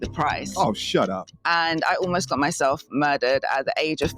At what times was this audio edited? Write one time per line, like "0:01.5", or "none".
0:01.3